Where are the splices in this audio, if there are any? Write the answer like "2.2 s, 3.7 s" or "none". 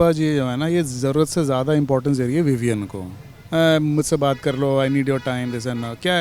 none